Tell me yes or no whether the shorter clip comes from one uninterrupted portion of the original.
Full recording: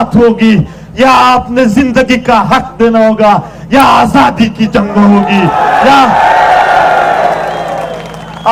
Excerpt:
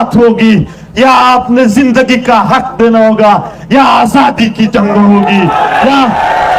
yes